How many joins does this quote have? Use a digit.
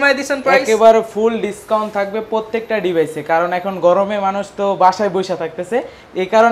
0